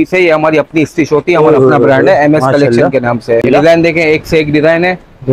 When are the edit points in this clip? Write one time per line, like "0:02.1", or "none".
0:03.4